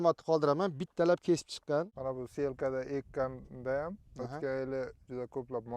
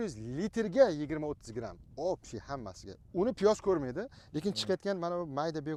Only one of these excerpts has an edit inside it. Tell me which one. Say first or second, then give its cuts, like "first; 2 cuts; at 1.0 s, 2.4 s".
first; 1 cut; at 2.0 s